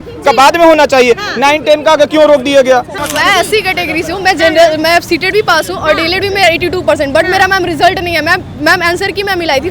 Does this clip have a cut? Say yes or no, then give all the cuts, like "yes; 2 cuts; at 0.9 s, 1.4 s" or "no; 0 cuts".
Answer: yes; 1 cut; at 3.0 s